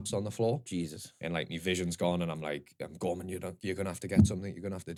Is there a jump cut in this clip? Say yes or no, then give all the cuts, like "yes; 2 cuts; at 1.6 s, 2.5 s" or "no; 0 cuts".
no; 0 cuts